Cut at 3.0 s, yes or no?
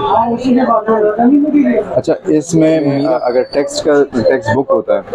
yes